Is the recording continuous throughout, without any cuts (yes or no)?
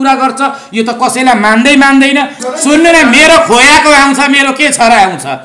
no